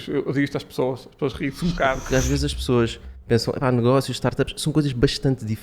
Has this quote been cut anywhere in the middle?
yes; 1 cut; at 2.0 s

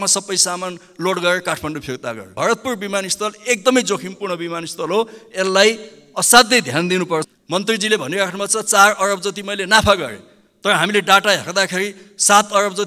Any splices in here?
yes; 2 cuts; at 2.3 s, 7.3 s

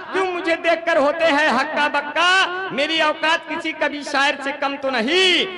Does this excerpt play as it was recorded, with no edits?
yes; 0 cuts

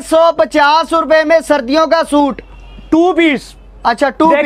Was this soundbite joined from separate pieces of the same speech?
no; 0 cuts

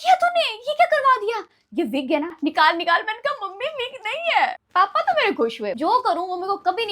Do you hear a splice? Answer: yes; 3 cuts; at 2.3 s, 4.6 s, 5.8 s

